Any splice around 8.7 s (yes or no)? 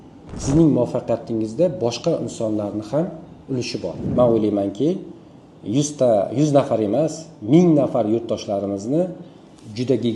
no